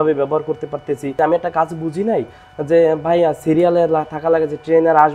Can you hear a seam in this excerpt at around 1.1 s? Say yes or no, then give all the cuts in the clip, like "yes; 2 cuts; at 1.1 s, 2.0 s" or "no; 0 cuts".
yes; 1 cut; at 1.1 s